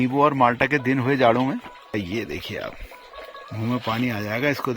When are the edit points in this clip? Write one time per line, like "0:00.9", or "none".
0:01.9